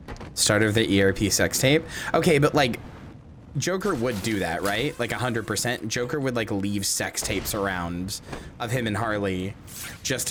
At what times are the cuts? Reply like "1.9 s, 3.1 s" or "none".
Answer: none